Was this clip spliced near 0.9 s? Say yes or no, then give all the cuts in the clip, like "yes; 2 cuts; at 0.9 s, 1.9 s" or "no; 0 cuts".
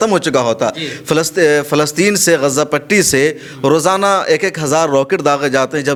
no; 0 cuts